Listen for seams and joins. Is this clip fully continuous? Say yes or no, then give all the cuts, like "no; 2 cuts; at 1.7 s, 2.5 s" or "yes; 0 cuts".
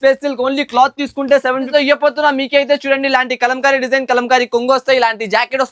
no; 1 cut; at 1.7 s